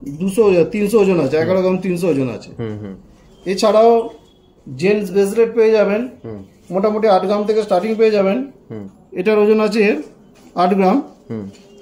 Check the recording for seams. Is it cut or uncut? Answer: uncut